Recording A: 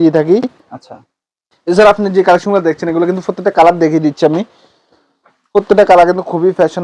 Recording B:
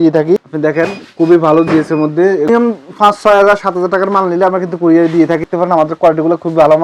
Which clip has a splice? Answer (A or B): B